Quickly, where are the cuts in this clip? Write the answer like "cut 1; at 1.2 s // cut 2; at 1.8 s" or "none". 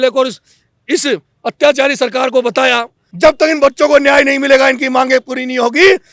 cut 1; at 3.0 s